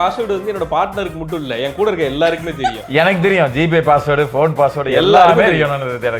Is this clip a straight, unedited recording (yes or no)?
yes